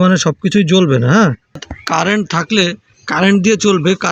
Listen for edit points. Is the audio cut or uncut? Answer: cut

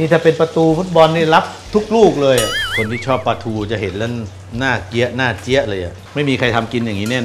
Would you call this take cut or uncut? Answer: cut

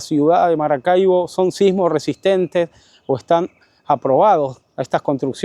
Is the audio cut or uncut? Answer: uncut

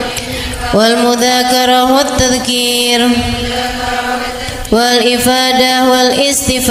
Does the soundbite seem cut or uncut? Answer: uncut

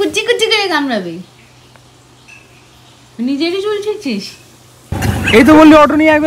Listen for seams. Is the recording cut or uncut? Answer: cut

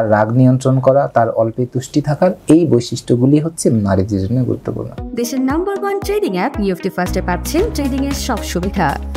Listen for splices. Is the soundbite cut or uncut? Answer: cut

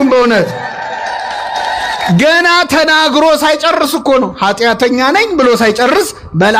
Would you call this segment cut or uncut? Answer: uncut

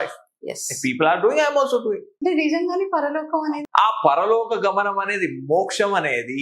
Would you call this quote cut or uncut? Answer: cut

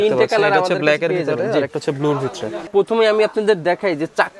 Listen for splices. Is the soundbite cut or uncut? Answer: cut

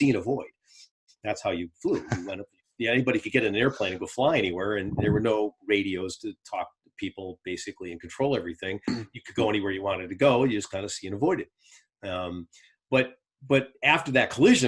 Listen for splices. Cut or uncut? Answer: uncut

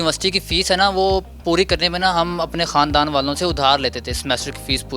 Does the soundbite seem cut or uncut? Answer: uncut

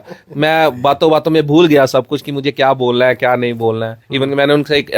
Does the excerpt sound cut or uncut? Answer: uncut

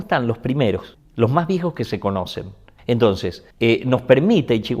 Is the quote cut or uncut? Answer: cut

